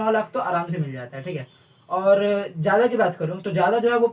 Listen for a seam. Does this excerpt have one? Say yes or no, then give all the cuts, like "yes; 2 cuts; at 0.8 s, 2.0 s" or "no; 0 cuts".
no; 0 cuts